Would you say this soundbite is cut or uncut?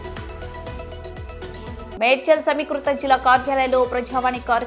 cut